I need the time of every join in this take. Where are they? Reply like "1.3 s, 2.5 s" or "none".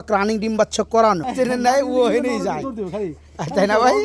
1.1 s